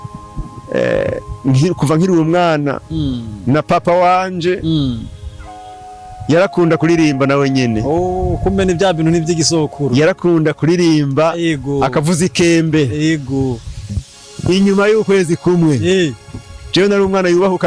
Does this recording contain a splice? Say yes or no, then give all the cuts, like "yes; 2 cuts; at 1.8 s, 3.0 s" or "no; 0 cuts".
yes; 1 cut; at 14.1 s